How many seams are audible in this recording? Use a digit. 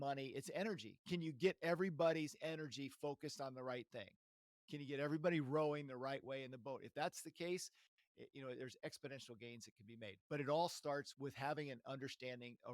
1